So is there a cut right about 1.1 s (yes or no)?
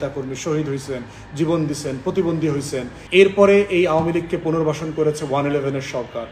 no